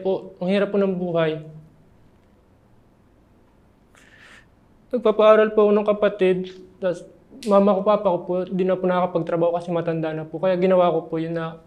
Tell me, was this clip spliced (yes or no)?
no